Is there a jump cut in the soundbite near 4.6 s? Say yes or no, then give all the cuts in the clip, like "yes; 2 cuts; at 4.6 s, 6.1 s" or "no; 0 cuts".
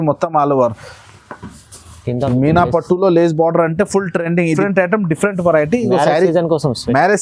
yes; 1 cut; at 4.6 s